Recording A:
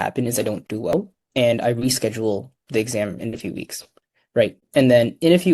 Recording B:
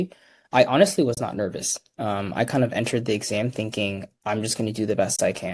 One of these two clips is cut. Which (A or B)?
A